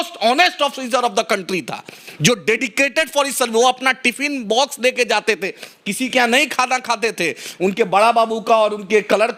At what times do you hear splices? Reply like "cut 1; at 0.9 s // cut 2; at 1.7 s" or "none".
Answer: none